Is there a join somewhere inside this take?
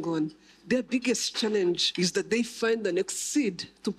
yes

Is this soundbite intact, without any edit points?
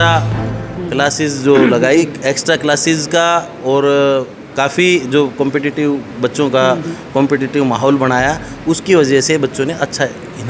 yes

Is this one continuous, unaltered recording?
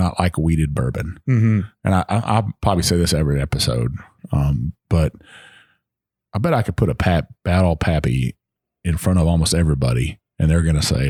yes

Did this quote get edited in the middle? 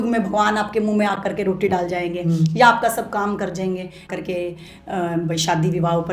yes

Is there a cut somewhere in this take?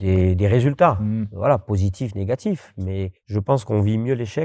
yes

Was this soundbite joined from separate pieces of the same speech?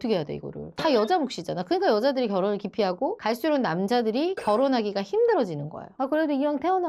yes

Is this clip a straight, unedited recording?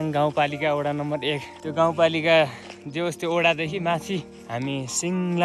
yes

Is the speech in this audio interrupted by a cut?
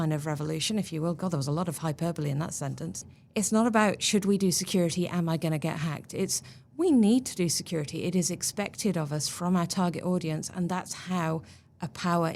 yes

